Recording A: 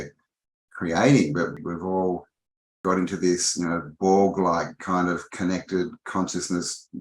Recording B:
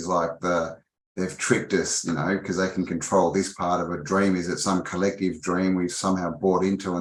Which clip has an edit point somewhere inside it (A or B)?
A